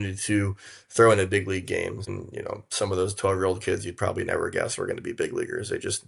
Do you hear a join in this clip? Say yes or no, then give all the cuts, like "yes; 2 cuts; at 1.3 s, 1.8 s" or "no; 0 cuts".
yes; 1 cut; at 2.1 s